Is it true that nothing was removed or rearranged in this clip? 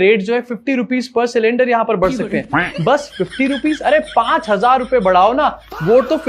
yes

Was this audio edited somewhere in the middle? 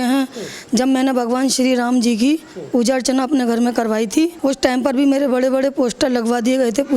yes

